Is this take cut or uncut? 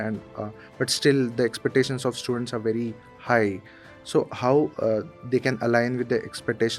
uncut